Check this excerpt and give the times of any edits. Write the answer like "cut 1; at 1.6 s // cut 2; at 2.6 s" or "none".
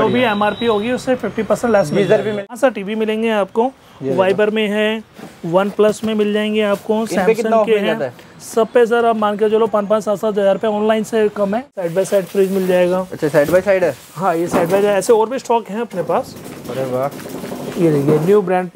cut 1; at 2.5 s // cut 2; at 11.7 s